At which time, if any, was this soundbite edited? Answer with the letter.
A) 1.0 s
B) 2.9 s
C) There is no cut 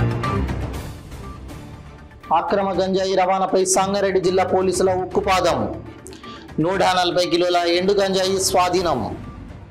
A